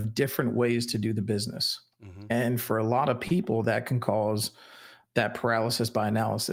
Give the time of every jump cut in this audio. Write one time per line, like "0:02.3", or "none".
none